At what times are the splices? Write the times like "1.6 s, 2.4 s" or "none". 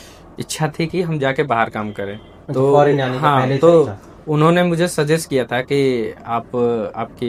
none